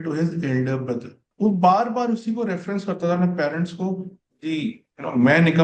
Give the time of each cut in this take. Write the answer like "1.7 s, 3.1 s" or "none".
1.2 s